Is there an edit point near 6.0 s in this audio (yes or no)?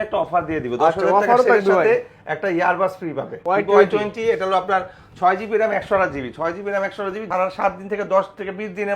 no